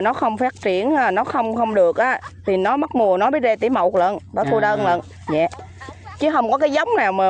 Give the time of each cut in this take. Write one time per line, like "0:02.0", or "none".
none